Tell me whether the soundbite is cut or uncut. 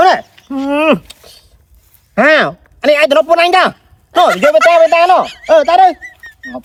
uncut